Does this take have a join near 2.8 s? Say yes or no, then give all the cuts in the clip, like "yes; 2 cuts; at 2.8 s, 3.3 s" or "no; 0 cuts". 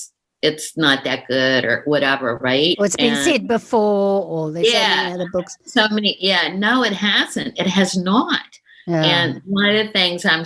yes; 1 cut; at 2.8 s